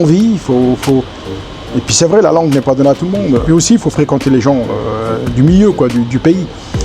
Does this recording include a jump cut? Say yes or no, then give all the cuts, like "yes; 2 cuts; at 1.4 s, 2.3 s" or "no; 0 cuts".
yes; 1 cut; at 3.4 s